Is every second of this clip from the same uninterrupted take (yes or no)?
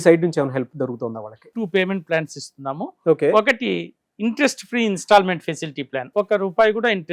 no